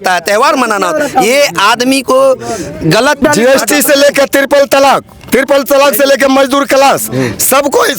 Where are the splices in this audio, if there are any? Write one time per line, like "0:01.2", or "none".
0:03.2